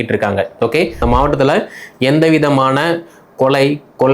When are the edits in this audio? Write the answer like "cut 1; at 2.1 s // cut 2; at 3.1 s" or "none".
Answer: cut 1; at 1.0 s

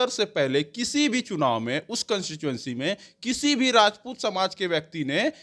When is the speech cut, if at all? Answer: none

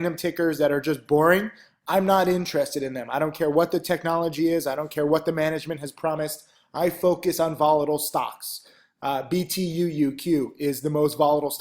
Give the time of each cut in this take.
cut 1; at 7.8 s

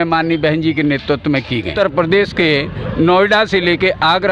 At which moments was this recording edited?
cut 1; at 1.7 s

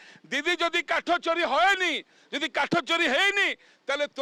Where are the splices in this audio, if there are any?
none

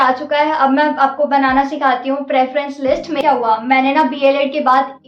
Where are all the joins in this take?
cut 1; at 3.2 s

